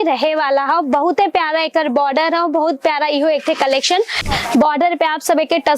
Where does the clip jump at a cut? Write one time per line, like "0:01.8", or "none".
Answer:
0:04.2